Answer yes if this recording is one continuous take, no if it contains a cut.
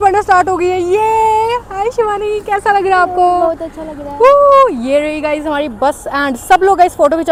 yes